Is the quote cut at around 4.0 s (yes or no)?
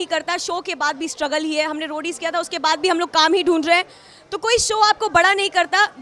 no